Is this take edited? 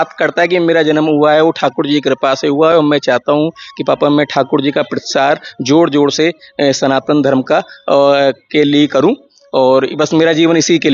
no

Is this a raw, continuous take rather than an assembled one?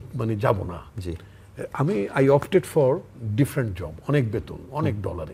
yes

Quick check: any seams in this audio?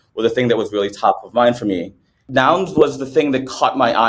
yes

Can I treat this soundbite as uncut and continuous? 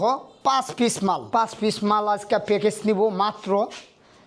no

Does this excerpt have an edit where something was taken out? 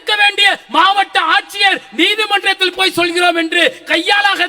no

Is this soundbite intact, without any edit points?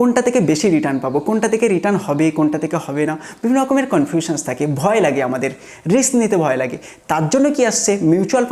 yes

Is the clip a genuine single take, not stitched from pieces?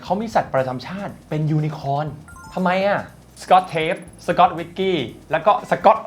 no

